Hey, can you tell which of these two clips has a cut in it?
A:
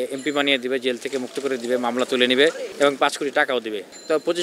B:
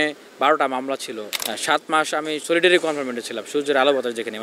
B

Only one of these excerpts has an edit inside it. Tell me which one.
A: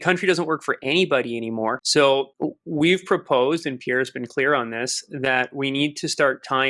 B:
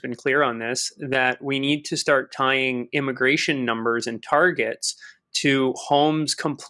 A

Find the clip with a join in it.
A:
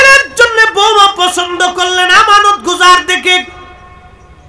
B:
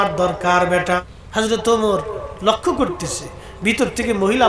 B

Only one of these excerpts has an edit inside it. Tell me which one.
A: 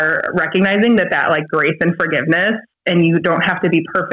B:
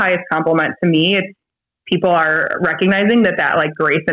B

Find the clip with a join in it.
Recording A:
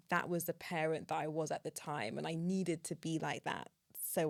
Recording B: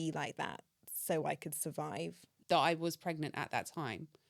B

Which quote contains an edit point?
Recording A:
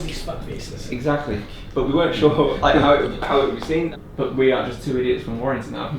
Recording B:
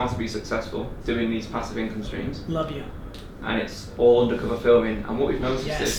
A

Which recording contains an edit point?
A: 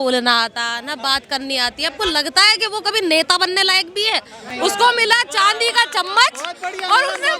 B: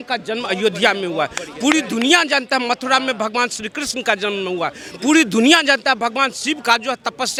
A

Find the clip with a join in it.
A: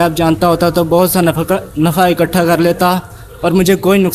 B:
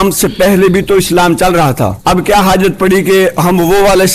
B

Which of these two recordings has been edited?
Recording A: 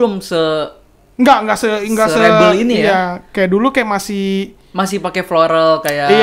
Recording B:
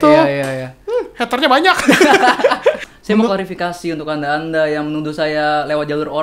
B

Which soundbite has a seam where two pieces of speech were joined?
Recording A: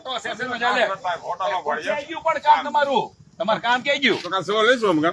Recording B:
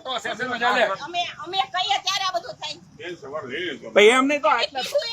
B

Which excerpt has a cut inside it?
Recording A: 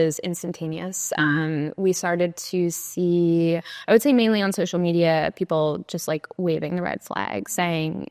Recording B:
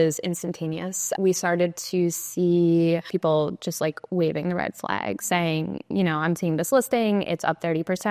B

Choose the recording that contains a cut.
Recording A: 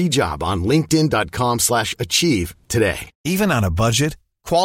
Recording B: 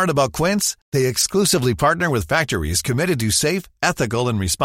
A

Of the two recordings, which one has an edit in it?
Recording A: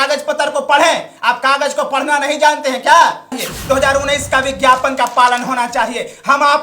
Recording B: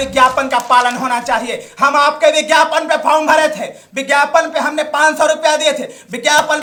A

